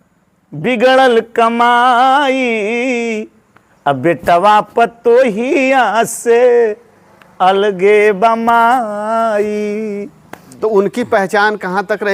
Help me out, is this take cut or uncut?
cut